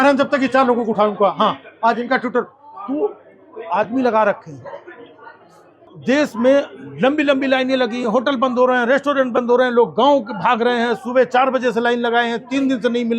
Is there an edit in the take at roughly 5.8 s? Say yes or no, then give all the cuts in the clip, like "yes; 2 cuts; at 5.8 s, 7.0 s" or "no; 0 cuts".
yes; 1 cut; at 5.8 s